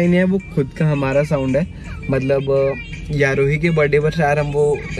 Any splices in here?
no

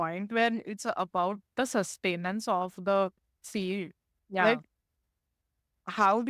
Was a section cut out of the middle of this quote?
no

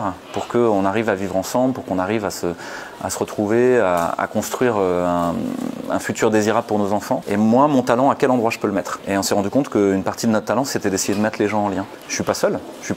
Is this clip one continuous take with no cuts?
no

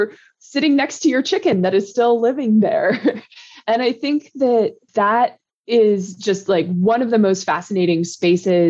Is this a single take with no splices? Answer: yes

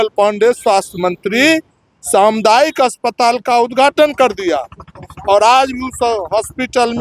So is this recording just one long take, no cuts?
yes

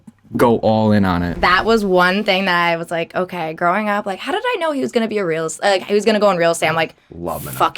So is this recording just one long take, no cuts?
no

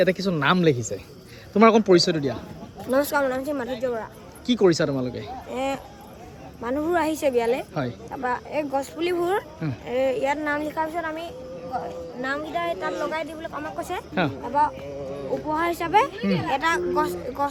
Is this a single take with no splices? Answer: yes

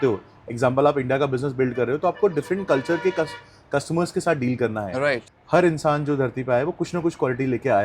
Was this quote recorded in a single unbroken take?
no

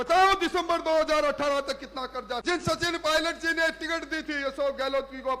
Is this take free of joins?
no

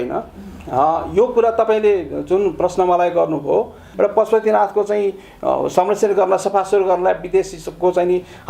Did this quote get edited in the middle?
yes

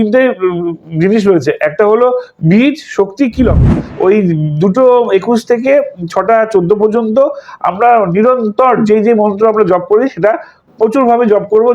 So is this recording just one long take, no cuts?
no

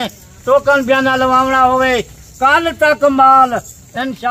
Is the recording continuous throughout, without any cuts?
yes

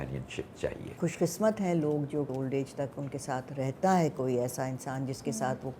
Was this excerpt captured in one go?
no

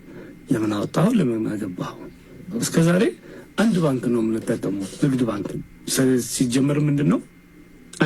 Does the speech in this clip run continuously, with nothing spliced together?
yes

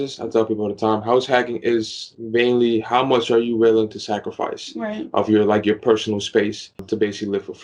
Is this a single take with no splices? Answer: no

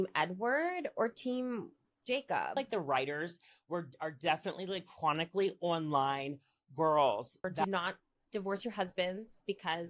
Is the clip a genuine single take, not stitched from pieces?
no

